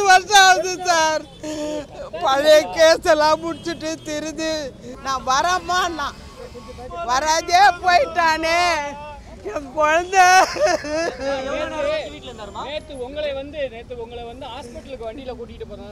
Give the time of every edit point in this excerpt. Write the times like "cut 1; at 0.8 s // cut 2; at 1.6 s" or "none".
cut 1; at 4.9 s